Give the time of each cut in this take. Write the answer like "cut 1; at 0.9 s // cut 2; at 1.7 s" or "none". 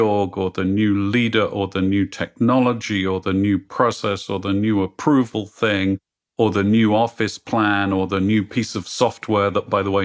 none